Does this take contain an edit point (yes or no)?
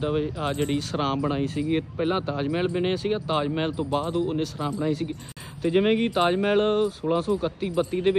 no